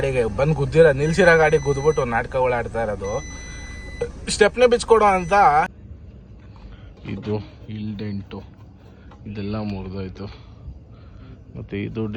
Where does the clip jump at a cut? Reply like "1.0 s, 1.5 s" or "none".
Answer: 5.7 s